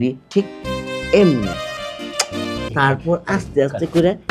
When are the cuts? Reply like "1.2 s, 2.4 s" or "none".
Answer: 2.6 s